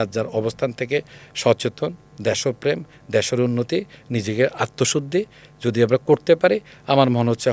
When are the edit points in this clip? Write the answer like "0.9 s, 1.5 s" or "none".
none